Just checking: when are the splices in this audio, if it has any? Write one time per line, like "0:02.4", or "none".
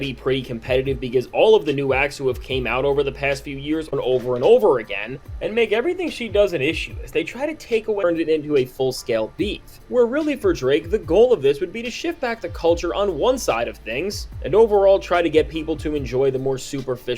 0:03.9
0:08.0